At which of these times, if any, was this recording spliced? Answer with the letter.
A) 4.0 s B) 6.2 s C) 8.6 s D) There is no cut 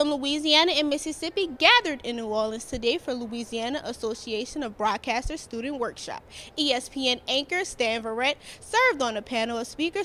D